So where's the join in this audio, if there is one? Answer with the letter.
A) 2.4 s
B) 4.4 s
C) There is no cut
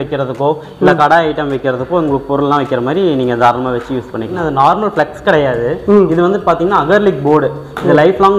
B